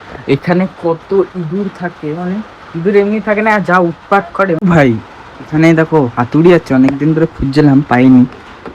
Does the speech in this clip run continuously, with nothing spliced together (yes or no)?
no